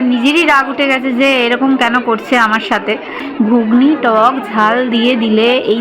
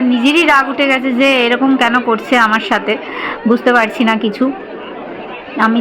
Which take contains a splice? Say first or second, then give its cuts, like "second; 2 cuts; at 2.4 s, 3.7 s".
first; 1 cut; at 3.2 s